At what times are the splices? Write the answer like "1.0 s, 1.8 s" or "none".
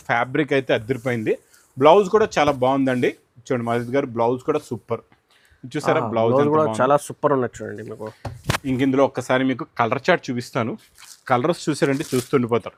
none